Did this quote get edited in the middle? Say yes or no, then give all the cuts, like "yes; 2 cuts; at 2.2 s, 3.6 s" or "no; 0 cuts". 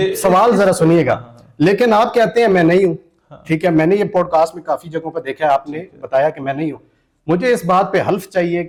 no; 0 cuts